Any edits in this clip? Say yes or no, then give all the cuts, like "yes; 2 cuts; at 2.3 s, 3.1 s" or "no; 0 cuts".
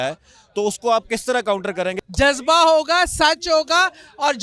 yes; 1 cut; at 2.0 s